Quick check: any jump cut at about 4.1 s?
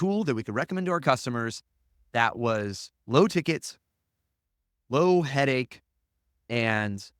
no; 0 cuts

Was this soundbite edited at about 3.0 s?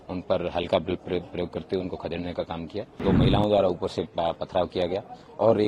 yes; 1 cut; at 3.0 s

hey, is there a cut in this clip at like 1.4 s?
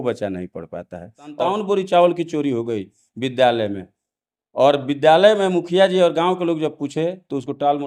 yes; 1 cut; at 1.4 s

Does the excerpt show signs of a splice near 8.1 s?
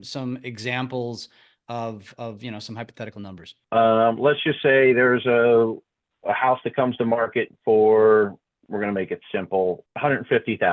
no; 2 cuts; at 3.6 s, 9.8 s

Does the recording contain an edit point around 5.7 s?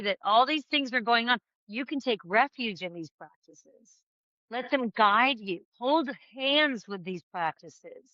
yes; 1 cut; at 5.7 s

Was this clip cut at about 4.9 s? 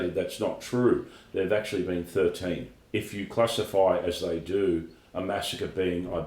no; 1 cut; at 2.7 s

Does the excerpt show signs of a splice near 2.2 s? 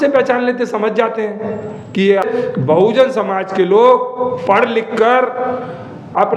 yes; 1 cut; at 2.2 s

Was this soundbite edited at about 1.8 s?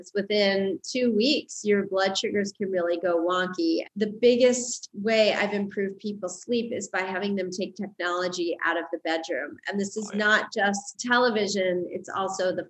no; 2 cuts; at 3.9 s, 10.9 s

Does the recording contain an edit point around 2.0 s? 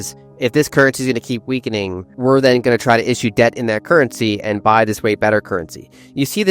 yes; 1 cut; at 2.0 s

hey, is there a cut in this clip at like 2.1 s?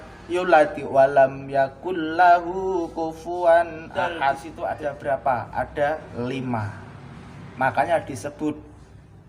no; 1 cut; at 4.5 s

